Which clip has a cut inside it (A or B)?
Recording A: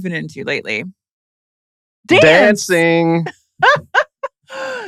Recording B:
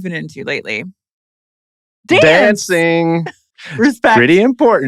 B